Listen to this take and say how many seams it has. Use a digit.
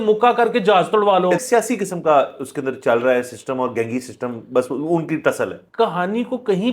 2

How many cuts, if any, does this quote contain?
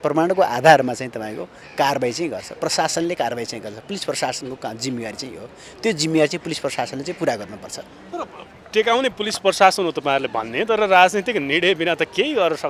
0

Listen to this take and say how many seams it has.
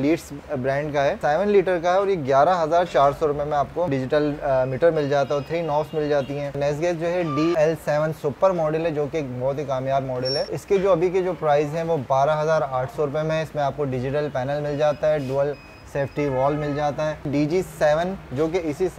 6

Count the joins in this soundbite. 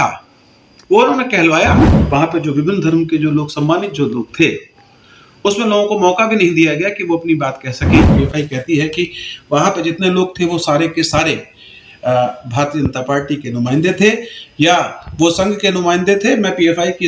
2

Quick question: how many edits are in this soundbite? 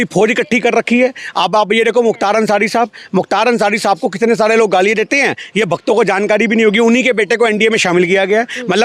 0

